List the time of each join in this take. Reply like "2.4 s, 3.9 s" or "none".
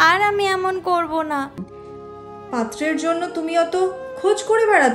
1.7 s